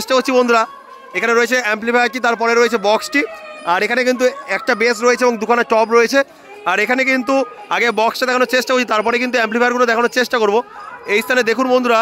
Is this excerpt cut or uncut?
uncut